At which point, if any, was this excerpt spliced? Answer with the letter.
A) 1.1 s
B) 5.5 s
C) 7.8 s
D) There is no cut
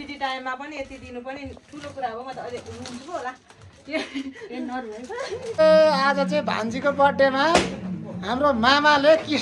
B